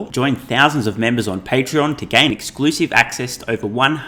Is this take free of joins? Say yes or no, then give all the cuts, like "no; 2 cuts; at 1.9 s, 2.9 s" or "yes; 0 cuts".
yes; 0 cuts